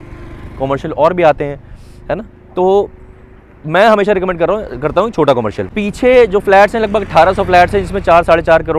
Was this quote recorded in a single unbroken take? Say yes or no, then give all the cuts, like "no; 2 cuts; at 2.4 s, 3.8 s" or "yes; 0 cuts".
no; 1 cut; at 5.6 s